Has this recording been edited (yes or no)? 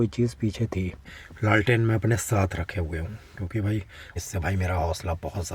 yes